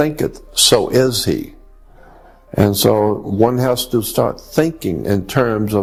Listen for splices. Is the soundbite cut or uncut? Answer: uncut